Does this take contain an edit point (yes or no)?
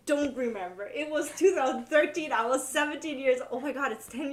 no